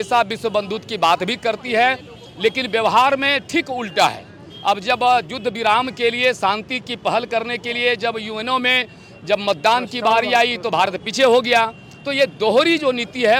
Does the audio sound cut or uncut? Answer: uncut